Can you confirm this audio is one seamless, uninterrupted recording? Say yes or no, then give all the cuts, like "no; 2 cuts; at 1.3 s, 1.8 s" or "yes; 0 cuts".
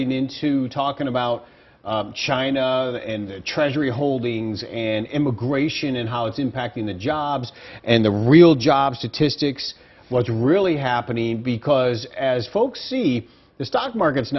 yes; 0 cuts